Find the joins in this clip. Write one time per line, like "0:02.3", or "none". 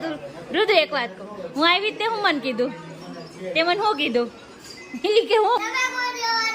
0:05.6